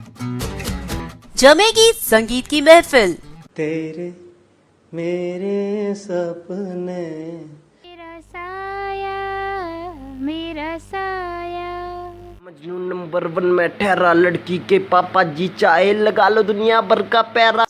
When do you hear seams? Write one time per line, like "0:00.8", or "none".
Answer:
none